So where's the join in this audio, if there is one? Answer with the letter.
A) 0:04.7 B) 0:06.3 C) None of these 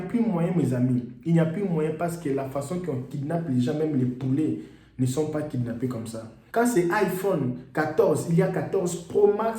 B